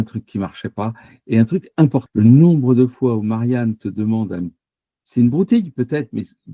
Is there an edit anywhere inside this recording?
yes; 1 cut; at 2.1 s

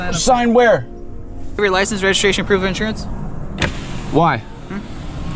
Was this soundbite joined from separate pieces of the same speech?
yes; 1 cut; at 1.6 s

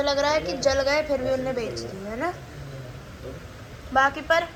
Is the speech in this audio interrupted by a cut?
no; 0 cuts

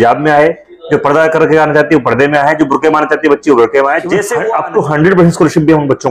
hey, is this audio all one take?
no; 1 cut; at 4.1 s

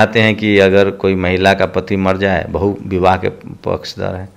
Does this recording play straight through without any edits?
yes; 0 cuts

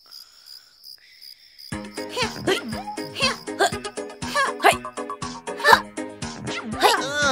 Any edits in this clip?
yes; 1 cut; at 1.3 s

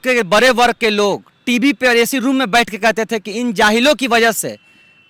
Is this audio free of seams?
yes; 0 cuts

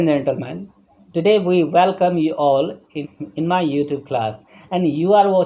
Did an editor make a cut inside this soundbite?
yes; 1 cut; at 3.0 s

